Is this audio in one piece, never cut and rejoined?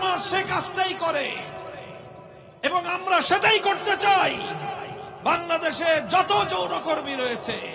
yes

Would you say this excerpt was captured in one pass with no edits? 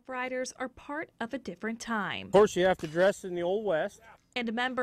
no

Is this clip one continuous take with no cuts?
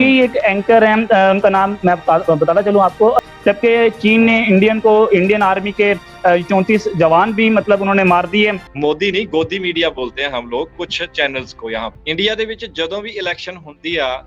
no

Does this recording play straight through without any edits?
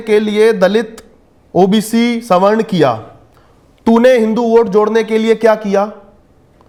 yes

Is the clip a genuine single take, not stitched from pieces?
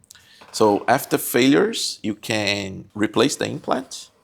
no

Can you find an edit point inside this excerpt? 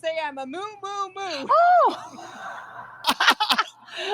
yes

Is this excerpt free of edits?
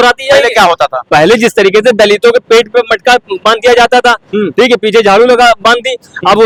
yes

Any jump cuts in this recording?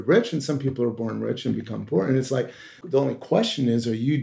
yes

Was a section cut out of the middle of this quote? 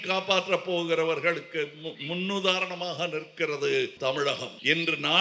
yes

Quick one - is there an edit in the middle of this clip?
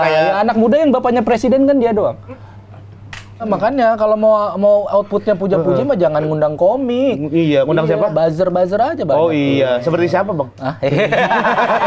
yes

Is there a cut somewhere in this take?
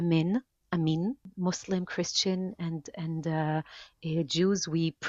yes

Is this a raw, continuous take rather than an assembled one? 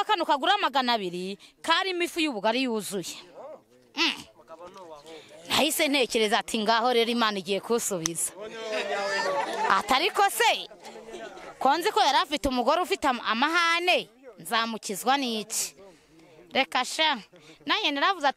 yes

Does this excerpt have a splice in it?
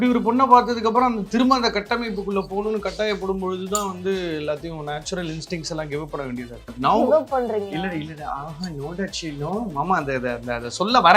yes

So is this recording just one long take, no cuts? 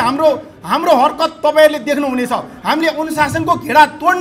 yes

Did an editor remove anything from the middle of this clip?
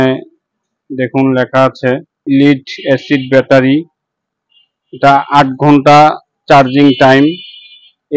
yes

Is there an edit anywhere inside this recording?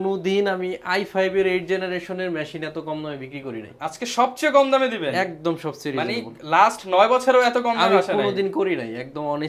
no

